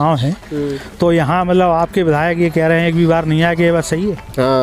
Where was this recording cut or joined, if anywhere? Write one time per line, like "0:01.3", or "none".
none